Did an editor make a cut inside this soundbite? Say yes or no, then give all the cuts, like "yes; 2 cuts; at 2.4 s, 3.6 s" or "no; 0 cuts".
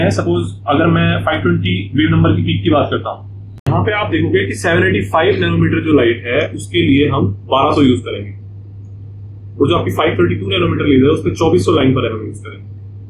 yes; 1 cut; at 3.7 s